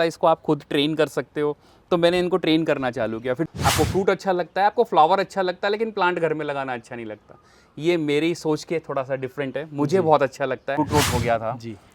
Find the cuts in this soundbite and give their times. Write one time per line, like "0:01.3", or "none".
0:03.5
0:10.8

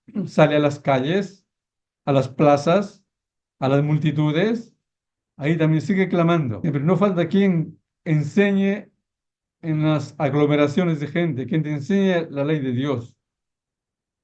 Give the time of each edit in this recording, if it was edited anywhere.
0:06.5

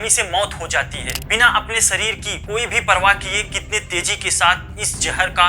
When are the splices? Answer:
0:01.2

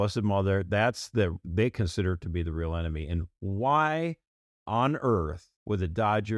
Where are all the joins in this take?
0:05.5

